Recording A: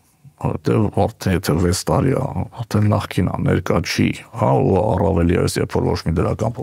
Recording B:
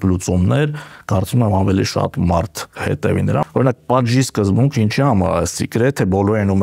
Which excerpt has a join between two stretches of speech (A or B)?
B